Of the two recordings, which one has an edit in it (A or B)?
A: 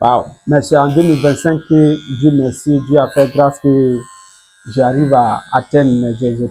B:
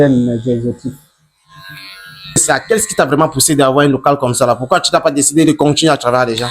B